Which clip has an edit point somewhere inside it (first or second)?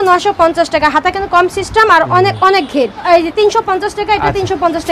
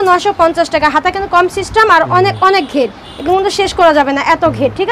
first